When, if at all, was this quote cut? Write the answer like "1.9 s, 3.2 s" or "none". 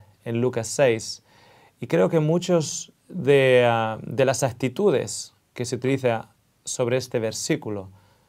3.6 s